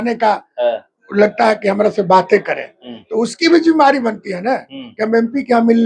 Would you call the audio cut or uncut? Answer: uncut